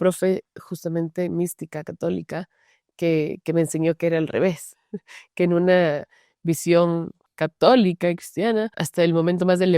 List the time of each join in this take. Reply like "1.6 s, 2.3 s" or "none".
7.2 s, 8.8 s